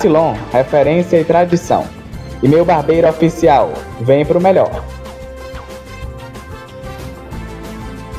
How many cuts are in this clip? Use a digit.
0